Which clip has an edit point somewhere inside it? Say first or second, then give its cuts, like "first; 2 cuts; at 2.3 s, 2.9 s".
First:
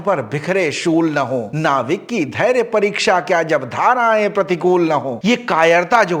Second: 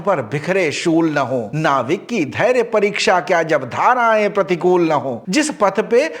first; 1 cut; at 5.1 s